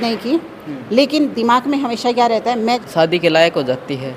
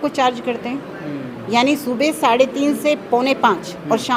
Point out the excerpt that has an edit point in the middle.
first; 1 cut; at 2.8 s

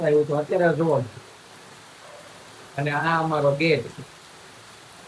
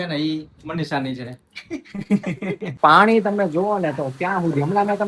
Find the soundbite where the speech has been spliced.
second; 1 cut; at 2.7 s

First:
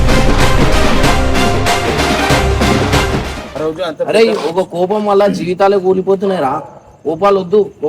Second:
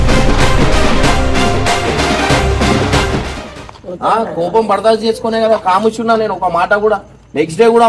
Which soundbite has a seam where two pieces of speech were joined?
first; 1 cut; at 3.4 s

